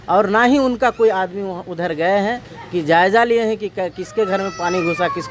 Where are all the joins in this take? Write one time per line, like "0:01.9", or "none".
none